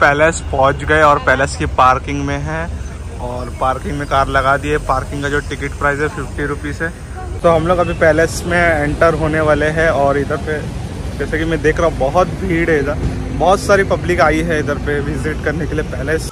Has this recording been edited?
no; 0 cuts

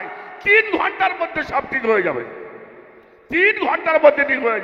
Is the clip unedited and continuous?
yes; 0 cuts

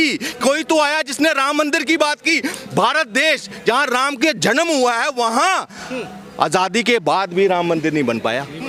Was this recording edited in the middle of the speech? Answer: no; 0 cuts

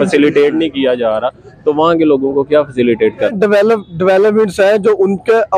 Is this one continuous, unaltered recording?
no; 1 cut; at 3.3 s

